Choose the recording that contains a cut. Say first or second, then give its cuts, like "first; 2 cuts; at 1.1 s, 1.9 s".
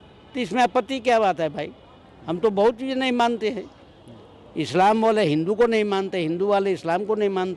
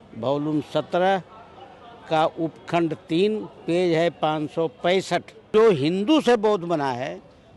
second; 1 cut; at 5.5 s